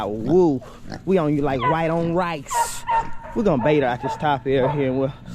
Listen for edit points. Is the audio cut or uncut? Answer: cut